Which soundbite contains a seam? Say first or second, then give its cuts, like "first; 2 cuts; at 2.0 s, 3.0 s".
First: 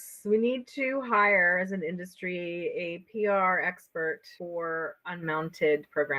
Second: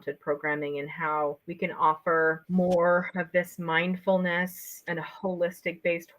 second; 2 cuts; at 2.4 s, 4.8 s